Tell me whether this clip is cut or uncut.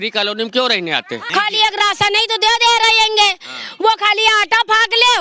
cut